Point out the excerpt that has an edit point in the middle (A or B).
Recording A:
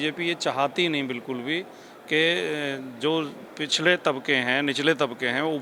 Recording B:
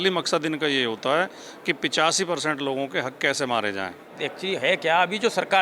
B